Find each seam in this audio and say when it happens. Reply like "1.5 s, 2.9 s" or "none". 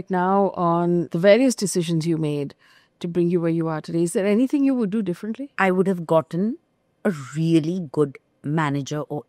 1.1 s, 5.5 s